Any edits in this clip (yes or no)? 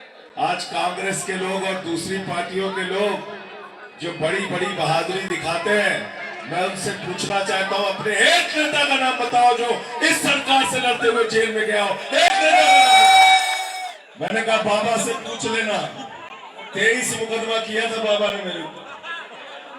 yes